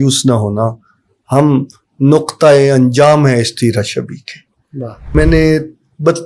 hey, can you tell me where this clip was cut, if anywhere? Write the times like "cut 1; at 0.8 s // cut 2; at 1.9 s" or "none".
cut 1; at 5.1 s